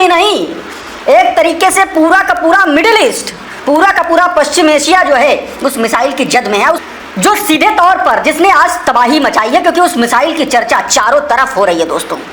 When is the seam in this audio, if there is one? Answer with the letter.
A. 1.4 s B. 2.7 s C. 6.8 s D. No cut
C